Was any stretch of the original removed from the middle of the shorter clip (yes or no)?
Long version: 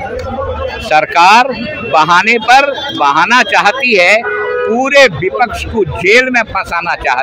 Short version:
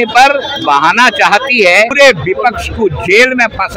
yes